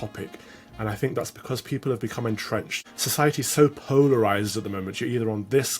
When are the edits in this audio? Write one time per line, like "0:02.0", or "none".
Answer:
0:03.3